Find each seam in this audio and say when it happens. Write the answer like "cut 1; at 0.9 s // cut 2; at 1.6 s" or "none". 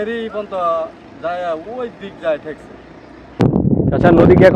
cut 1; at 3.6 s